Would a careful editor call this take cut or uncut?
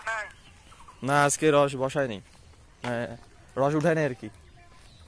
uncut